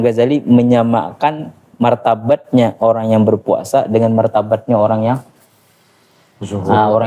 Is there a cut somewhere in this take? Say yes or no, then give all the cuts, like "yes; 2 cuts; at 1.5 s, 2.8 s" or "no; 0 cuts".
no; 0 cuts